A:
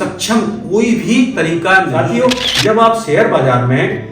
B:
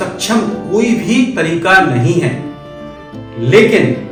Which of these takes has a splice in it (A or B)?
A